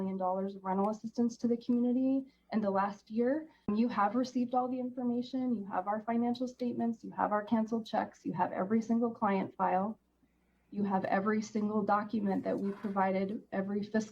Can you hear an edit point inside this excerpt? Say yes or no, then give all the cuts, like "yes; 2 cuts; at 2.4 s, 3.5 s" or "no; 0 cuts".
yes; 1 cut; at 3.7 s